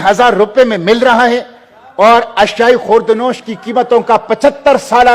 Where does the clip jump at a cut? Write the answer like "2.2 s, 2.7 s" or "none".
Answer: none